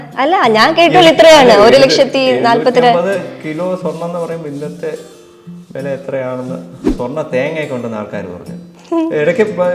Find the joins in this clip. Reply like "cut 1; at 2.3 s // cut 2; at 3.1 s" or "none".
cut 1; at 6.9 s